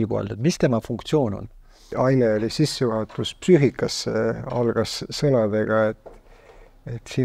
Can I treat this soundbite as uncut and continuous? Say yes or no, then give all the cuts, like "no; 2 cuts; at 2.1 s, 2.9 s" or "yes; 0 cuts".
no; 1 cut; at 1.9 s